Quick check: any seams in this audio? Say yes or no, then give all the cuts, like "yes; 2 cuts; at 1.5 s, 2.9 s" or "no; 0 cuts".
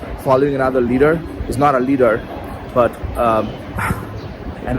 no; 0 cuts